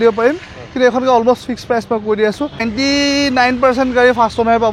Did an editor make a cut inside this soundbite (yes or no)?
yes